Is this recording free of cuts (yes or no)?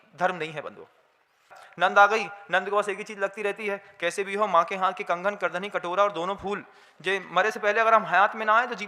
no